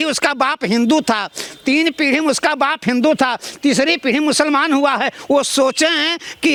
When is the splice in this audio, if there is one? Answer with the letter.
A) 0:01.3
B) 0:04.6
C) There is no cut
C